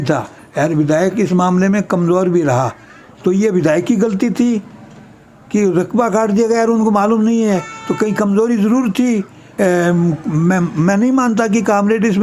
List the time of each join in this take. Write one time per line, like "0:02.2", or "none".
0:03.0
0:09.4